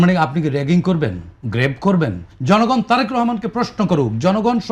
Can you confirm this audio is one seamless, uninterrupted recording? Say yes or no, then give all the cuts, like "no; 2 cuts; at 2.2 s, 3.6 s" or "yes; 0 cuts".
no; 1 cut; at 2.3 s